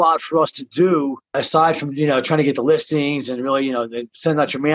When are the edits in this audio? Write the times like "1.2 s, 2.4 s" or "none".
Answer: 1.4 s